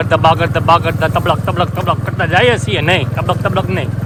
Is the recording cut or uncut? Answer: uncut